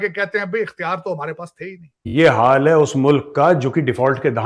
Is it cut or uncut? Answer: cut